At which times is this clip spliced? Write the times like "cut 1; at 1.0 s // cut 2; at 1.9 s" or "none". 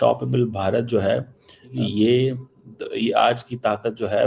cut 1; at 1.7 s